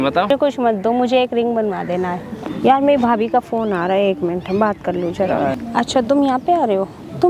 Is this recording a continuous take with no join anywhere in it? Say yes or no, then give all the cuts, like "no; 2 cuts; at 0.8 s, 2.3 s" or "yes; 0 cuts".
no; 2 cuts; at 2.4 s, 5.5 s